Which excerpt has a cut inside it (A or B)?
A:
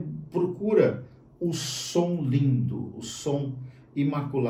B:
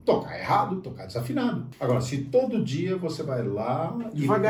B